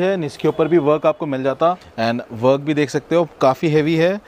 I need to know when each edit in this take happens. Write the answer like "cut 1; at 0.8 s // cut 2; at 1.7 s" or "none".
cut 1; at 1.9 s